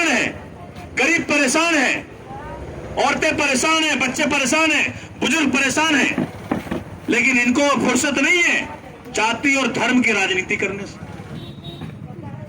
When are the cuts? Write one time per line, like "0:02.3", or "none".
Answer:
0:11.3